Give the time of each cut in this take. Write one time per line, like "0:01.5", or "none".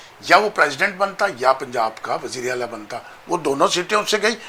none